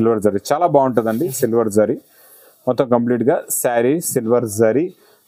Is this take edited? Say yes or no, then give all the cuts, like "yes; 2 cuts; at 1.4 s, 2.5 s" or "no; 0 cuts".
no; 0 cuts